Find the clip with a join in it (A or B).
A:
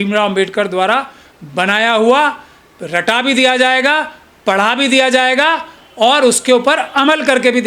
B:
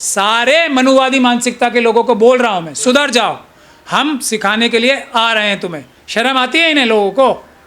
B